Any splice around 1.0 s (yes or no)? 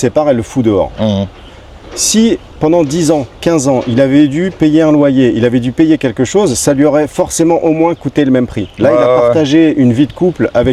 no